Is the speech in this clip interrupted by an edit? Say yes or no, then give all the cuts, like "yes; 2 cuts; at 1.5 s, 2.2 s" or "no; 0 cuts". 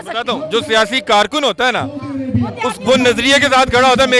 no; 0 cuts